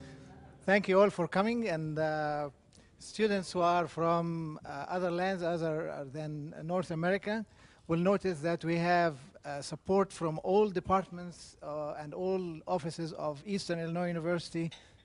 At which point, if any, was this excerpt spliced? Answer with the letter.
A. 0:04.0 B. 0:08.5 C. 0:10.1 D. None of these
C